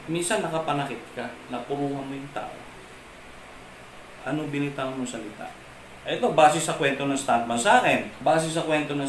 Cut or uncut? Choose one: uncut